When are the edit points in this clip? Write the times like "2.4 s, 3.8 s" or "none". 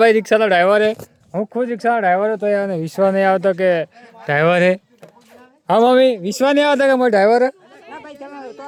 none